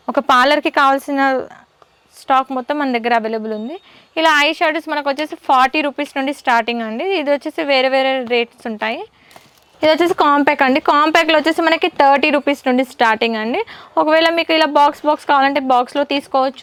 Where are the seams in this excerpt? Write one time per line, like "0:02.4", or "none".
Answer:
none